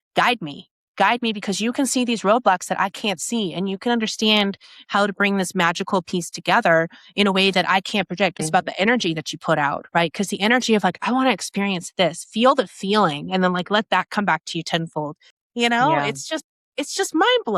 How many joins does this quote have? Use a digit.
2